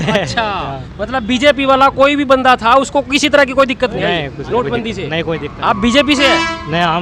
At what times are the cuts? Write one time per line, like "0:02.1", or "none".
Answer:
none